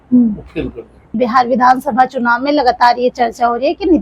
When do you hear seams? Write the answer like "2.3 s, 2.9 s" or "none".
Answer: 1.1 s